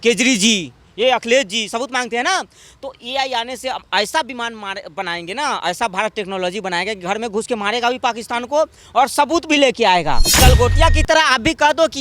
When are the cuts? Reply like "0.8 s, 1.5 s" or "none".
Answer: 10.4 s